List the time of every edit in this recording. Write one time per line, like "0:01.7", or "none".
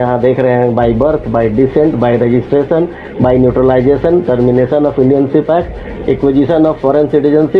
none